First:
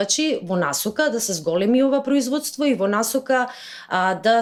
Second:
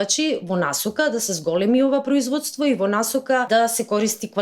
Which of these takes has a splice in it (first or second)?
second